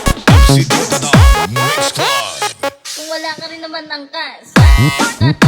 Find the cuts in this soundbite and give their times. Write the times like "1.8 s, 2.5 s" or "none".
1.2 s, 2.9 s, 4.5 s